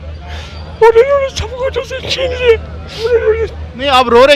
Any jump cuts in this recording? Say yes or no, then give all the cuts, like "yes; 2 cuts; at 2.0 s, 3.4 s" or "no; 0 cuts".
yes; 1 cut; at 3.1 s